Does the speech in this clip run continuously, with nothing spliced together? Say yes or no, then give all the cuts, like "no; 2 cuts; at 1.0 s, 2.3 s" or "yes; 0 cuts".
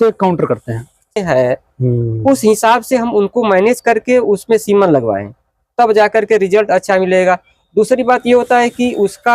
no; 1 cut; at 1.2 s